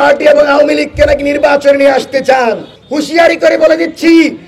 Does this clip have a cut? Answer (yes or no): yes